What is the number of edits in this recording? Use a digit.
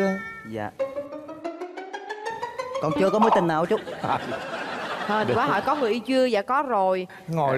0